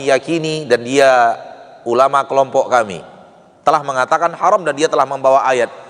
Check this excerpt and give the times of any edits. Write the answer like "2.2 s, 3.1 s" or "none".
none